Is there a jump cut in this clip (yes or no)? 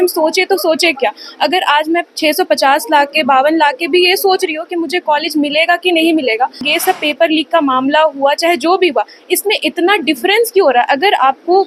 yes